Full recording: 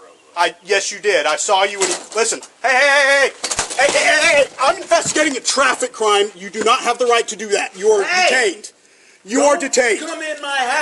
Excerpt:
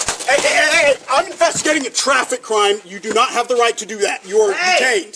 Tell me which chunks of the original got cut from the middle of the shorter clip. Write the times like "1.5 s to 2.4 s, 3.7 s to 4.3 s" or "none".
none